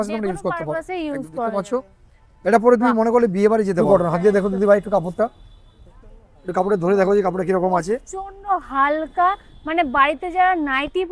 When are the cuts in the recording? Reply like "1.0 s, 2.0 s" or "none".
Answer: 3.8 s